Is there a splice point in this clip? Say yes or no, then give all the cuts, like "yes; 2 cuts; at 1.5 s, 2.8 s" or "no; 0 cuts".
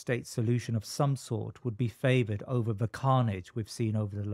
no; 0 cuts